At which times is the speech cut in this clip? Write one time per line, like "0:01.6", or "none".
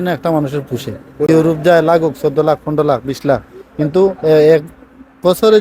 0:01.3